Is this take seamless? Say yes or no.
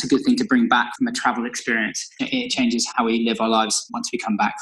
no